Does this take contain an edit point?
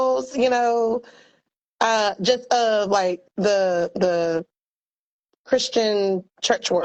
no; 0 cuts

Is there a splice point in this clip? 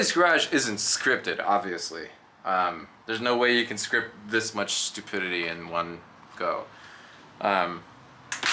no; 0 cuts

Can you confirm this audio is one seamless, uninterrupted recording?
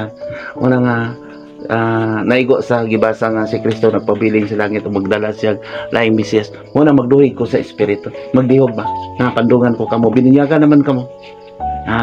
yes; 0 cuts

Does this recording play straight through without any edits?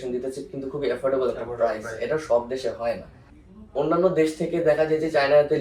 yes; 0 cuts

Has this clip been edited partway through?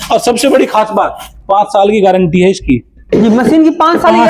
no; 0 cuts

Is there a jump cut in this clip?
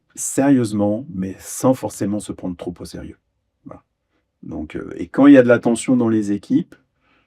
no; 0 cuts

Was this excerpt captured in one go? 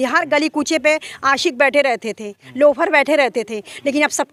yes; 0 cuts

